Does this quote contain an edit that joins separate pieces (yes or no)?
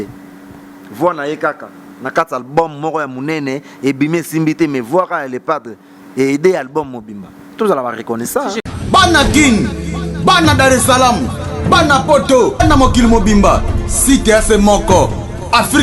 yes